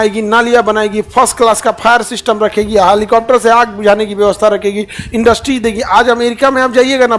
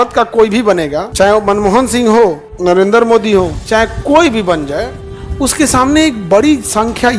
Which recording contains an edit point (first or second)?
second